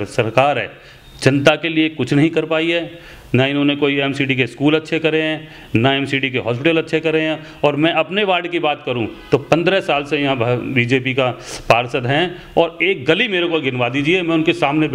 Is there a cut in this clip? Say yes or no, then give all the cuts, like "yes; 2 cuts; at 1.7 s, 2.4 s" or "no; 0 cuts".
no; 0 cuts